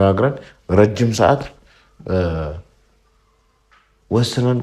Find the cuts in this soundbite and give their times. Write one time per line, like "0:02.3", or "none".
none